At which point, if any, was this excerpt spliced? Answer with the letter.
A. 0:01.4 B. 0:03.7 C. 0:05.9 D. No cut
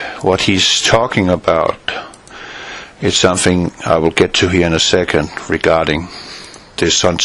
A